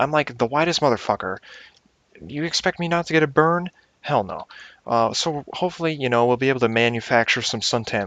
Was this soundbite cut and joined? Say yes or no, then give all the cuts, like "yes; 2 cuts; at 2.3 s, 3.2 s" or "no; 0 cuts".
yes; 1 cut; at 5.8 s